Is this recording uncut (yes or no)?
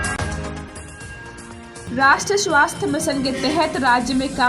yes